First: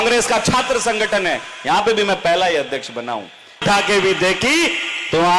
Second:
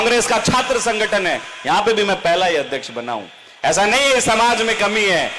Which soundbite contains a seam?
first; 1 cut; at 3.6 s

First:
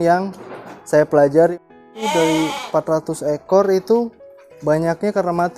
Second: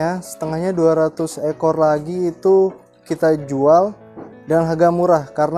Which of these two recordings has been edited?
first; 1 cut; at 1.6 s

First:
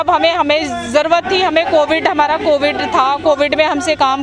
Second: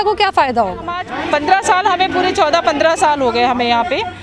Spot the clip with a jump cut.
second; 1 cut; at 1.1 s

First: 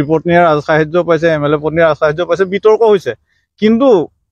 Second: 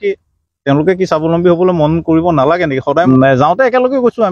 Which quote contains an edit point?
second; 1 cut; at 3.1 s

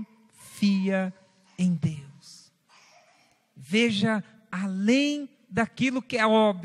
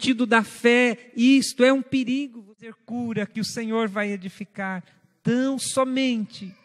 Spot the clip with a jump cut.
second; 1 cut; at 2.7 s

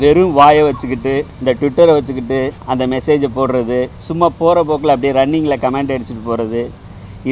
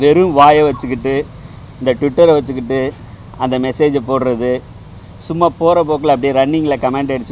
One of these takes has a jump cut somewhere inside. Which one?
first; 3 cuts; at 1.3 s, 2.6 s, 4.0 s

